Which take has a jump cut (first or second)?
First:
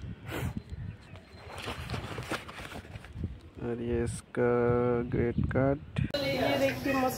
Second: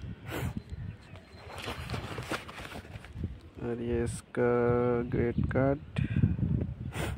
first